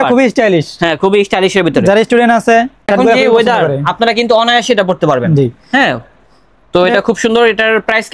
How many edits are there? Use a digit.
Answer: 0